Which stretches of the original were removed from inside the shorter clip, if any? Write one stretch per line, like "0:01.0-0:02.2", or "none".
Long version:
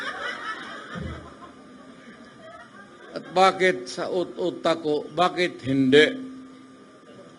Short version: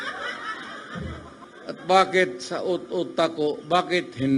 0:01.5-0:02.9